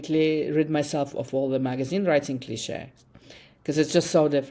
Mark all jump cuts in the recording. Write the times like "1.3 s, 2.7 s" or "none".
none